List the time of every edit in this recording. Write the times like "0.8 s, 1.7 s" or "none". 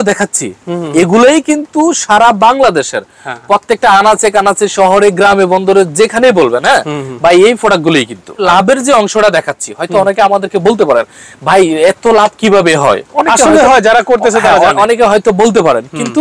8.4 s